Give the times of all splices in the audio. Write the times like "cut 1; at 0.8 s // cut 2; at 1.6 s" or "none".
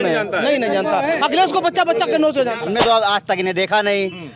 cut 1; at 2.6 s